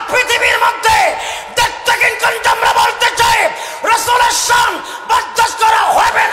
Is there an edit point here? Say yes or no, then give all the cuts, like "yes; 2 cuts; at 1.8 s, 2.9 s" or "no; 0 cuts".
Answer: no; 0 cuts